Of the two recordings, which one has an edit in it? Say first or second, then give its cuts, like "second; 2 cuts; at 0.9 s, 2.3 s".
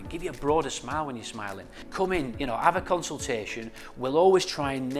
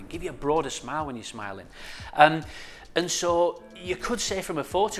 first; 1 cut; at 1.8 s